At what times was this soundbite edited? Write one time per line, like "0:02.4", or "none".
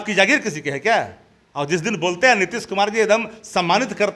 none

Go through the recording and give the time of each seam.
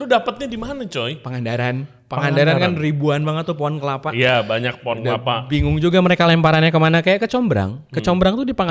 none

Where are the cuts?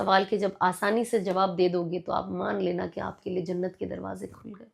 none

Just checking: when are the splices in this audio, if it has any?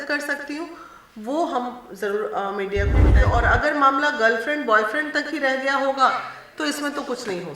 0:03.1

